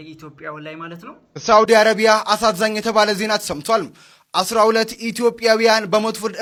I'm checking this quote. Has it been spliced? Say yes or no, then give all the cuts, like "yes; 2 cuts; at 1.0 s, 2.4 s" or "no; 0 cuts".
no; 0 cuts